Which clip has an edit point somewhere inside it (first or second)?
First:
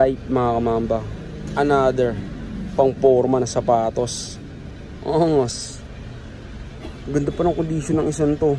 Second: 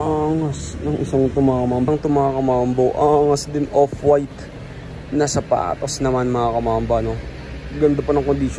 second